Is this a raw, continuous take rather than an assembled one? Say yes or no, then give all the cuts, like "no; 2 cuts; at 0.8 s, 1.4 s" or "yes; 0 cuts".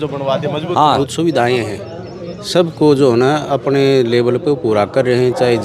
no; 1 cut; at 1.1 s